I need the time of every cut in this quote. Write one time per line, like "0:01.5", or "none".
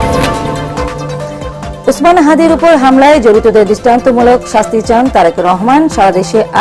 none